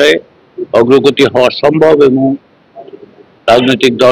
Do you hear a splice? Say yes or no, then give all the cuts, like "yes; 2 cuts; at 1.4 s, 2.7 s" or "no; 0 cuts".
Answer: no; 0 cuts